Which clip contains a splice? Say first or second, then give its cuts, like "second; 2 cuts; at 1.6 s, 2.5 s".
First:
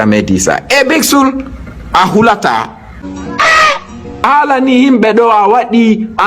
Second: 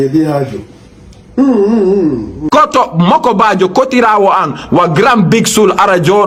first; 1 cut; at 4.2 s